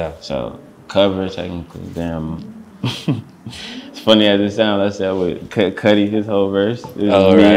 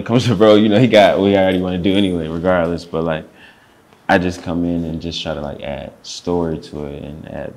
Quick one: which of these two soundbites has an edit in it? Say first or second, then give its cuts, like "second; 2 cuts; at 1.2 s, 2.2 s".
first; 1 cut; at 2.6 s